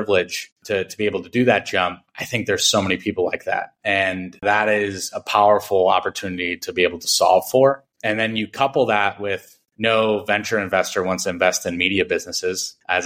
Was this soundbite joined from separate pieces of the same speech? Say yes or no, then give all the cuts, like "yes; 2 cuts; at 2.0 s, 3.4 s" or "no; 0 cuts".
no; 0 cuts